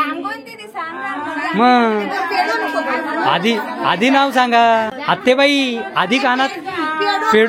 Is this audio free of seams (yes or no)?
no